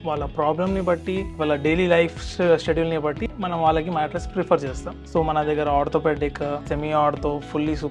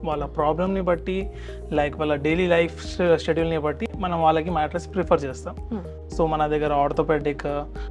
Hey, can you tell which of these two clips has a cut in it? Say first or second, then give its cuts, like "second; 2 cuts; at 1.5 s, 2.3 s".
first; 3 cuts; at 1.3 s, 4.9 s, 6.6 s